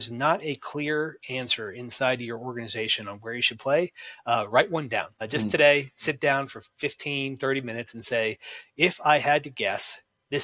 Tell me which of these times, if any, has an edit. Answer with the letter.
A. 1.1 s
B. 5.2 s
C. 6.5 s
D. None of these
B